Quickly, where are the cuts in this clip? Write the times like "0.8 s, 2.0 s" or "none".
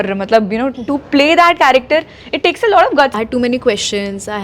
3.1 s